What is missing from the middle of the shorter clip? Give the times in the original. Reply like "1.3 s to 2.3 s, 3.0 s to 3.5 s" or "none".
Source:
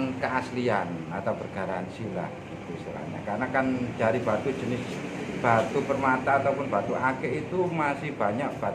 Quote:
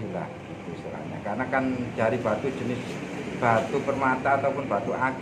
none